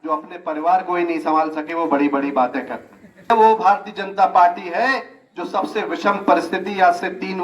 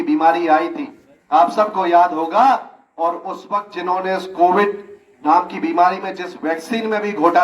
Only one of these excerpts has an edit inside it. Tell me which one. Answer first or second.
first